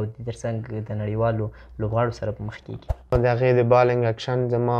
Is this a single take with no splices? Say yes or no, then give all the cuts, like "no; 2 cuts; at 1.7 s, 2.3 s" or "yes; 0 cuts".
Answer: no; 1 cut; at 3.1 s